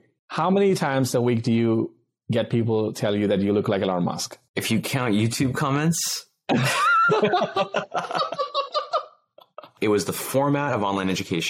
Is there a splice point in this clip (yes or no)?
yes